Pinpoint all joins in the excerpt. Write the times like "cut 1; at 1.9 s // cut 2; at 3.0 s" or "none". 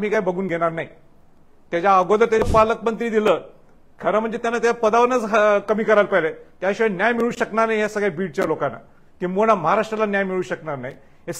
cut 1; at 2.4 s